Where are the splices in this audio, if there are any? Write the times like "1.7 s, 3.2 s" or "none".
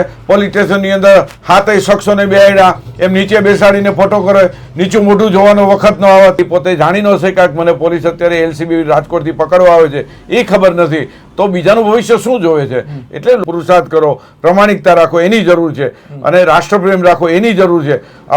6.4 s, 13.4 s